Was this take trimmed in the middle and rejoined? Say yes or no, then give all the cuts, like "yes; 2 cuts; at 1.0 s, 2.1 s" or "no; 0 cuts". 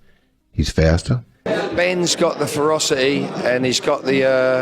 yes; 1 cut; at 1.4 s